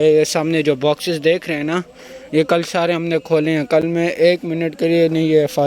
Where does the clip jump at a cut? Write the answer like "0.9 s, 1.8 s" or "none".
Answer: none